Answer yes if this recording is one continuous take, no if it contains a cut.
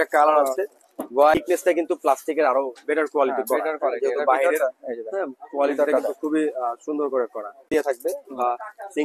no